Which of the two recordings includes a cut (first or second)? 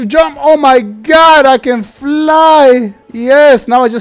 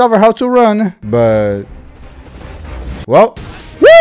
second